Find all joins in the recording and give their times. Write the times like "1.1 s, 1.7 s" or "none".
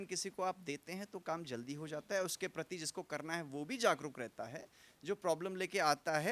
none